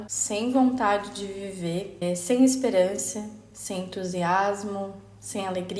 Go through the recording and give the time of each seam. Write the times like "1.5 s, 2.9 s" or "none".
none